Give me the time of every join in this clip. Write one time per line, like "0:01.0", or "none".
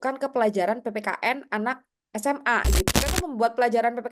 0:02.9